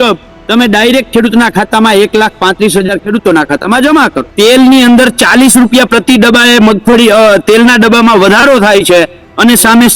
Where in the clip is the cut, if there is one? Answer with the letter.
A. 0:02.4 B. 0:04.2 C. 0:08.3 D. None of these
B